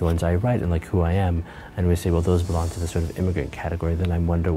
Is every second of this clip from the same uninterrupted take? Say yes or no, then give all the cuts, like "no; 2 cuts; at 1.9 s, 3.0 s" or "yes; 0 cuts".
yes; 0 cuts